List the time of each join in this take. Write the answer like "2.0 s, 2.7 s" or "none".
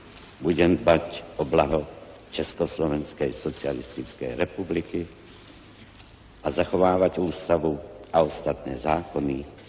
2.2 s